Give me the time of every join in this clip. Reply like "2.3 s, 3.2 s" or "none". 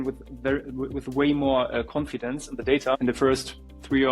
3.0 s